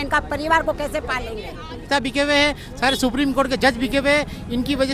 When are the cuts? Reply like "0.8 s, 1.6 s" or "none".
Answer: 1.9 s